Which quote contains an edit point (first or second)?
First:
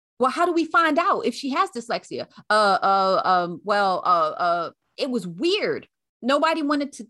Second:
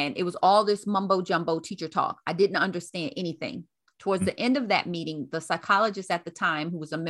first